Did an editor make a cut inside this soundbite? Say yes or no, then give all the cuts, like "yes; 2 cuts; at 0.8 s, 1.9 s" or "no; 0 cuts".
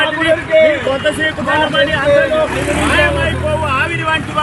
no; 0 cuts